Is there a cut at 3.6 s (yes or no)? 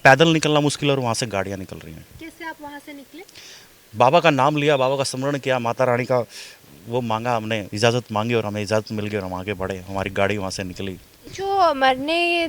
no